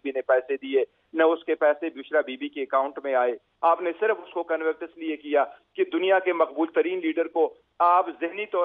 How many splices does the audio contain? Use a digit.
1